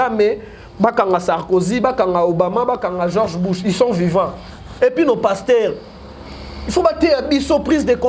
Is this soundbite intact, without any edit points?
no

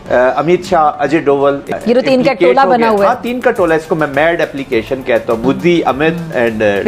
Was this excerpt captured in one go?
no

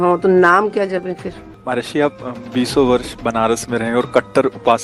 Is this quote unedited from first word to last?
no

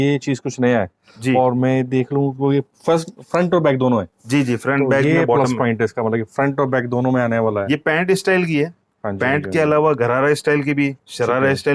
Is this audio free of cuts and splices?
yes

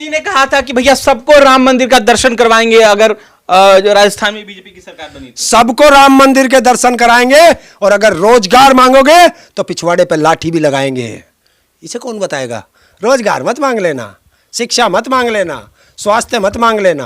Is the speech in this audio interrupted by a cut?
no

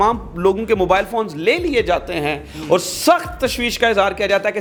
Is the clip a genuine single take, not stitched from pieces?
yes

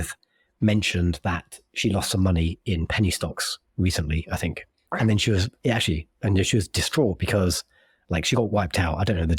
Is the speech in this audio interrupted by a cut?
no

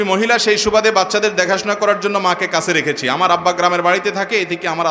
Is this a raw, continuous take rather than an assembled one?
yes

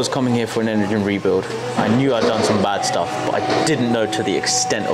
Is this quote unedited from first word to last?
yes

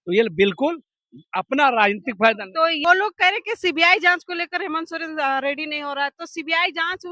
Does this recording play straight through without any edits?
no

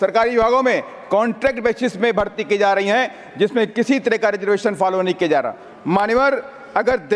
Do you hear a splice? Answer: no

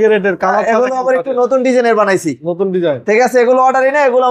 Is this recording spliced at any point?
no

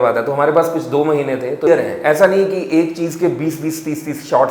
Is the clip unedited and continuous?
no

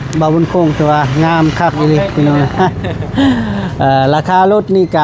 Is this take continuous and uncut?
no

